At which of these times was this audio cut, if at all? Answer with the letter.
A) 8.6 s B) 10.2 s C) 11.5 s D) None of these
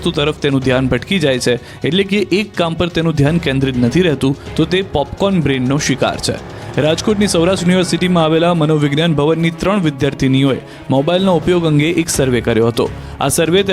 B